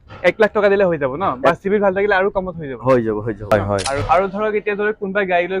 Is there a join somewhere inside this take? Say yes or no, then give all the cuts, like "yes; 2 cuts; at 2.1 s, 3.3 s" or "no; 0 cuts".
yes; 1 cut; at 3.5 s